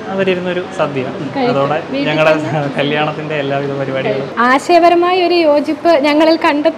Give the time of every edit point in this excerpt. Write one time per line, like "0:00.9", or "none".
0:04.3